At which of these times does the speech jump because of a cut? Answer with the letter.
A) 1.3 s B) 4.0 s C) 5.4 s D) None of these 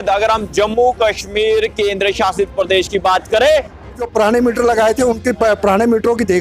B